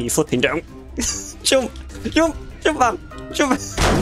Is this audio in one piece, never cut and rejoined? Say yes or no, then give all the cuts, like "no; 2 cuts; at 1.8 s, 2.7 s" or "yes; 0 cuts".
yes; 0 cuts